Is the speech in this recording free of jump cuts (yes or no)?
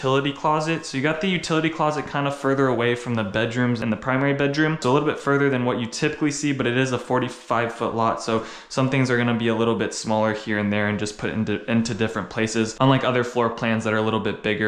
yes